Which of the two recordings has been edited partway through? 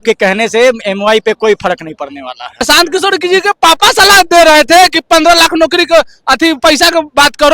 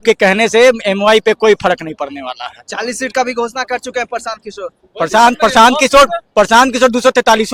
first; 1 cut; at 2.6 s

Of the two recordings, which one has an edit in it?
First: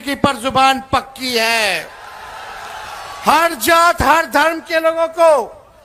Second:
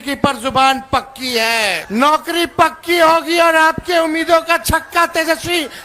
second; 1 cut; at 1.8 s

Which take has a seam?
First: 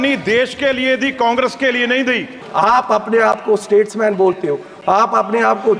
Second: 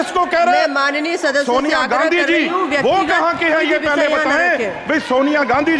first; 1 cut; at 2.4 s

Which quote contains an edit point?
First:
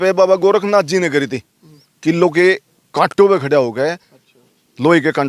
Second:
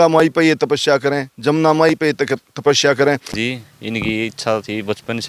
second; 1 cut; at 3.4 s

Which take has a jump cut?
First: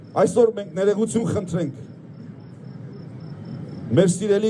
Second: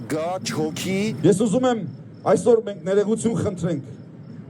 second; 1 cut; at 1.2 s

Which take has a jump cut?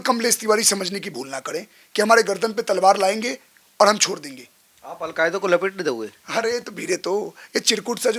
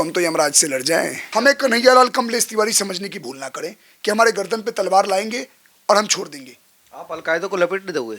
second; 1 cut; at 1.2 s

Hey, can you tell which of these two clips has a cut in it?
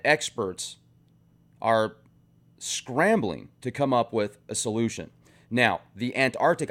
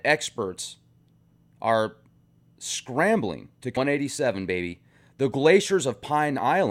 first; 1 cut; at 3.8 s

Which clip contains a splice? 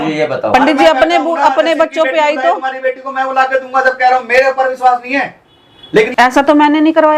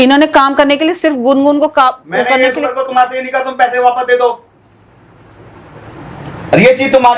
first; 1 cut; at 6.1 s

